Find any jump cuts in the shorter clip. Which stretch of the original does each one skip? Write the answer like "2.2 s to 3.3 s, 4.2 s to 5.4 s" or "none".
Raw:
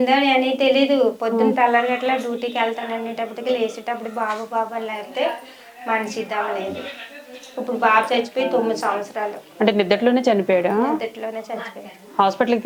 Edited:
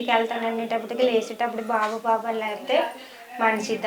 none